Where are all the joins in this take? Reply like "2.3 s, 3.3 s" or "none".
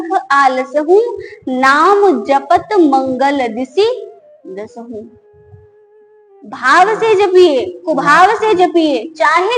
none